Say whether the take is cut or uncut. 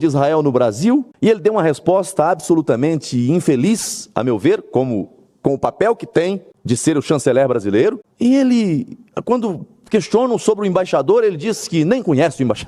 cut